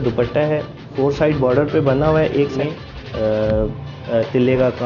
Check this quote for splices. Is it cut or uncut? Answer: cut